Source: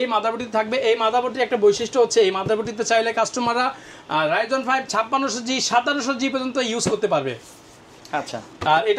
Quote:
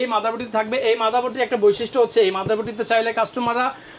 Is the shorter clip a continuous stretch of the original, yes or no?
yes